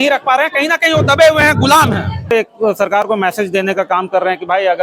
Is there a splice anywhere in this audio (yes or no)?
yes